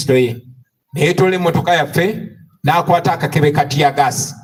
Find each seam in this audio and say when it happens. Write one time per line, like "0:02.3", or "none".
none